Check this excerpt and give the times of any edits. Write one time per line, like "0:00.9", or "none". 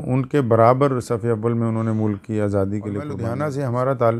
0:03.2